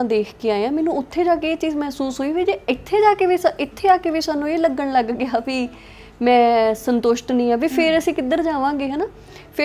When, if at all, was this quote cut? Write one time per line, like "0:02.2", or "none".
none